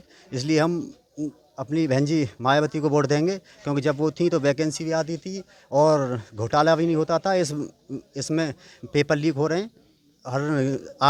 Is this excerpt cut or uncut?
uncut